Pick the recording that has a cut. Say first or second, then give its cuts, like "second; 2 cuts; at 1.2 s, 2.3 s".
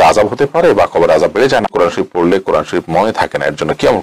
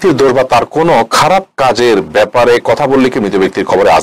first; 1 cut; at 1.7 s